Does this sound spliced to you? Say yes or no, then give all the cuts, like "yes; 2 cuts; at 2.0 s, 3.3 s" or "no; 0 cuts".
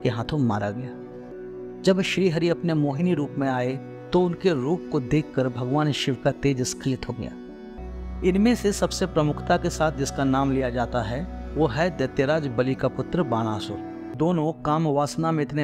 yes; 3 cuts; at 1.3 s, 7.7 s, 14.1 s